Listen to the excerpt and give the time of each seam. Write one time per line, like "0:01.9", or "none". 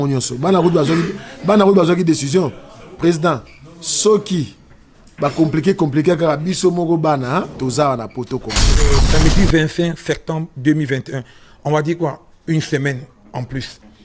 0:08.9